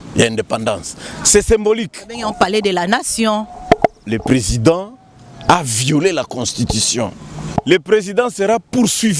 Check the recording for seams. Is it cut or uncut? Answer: cut